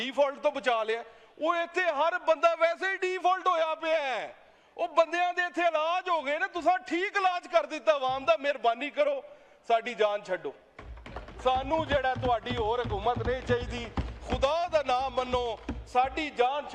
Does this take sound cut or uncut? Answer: uncut